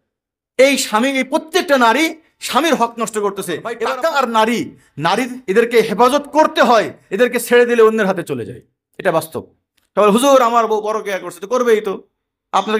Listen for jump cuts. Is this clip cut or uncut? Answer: cut